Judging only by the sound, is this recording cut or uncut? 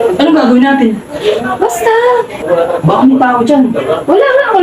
cut